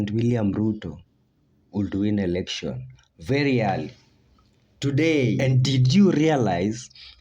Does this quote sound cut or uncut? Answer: cut